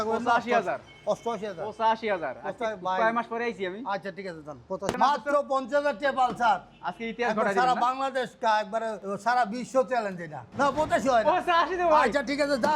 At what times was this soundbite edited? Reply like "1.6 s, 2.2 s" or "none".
4.9 s, 9.0 s, 10.4 s